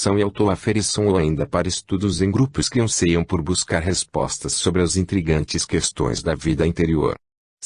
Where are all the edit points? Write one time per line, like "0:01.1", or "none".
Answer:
0:01.2